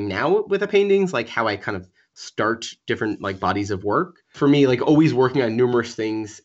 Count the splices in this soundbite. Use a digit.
1